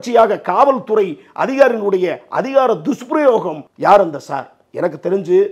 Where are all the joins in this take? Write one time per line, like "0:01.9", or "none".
0:03.6